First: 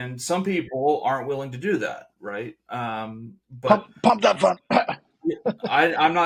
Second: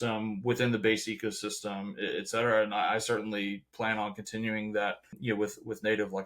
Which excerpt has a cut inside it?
second; 1 cut; at 5.1 s

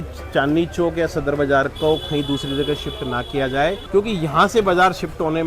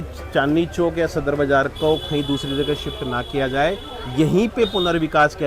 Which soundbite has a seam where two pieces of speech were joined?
first; 1 cut; at 3.8 s

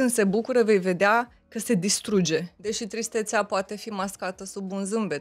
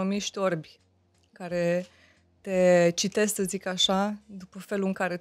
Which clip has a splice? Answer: first; 1 cut; at 2.5 s

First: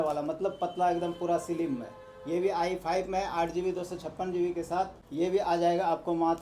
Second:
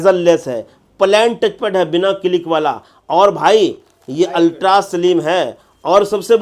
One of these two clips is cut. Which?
first; 1 cut; at 5.0 s

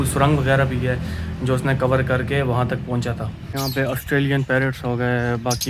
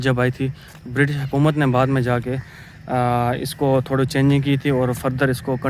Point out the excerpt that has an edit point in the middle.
first; 1 cut; at 3.4 s

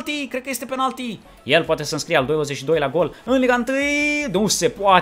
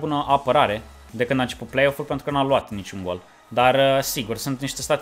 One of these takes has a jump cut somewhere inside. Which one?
first; 1 cut; at 1.3 s

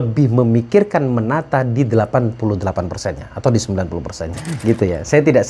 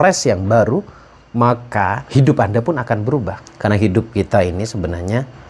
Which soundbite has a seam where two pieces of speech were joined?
first; 1 cut; at 4.5 s

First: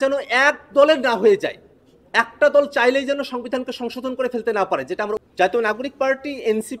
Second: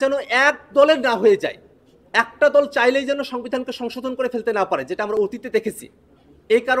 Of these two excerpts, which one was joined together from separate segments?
first; 1 cut; at 5.2 s

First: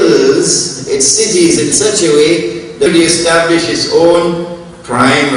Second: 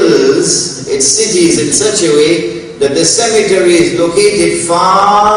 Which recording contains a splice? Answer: second; 1 cut; at 2.9 s

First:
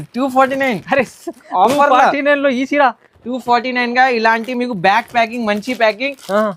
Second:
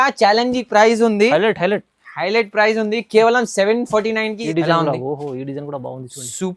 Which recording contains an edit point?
second; 1 cut; at 4.4 s

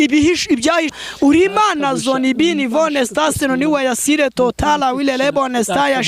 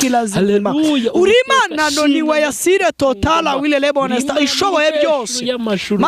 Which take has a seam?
first; 1 cut; at 0.9 s

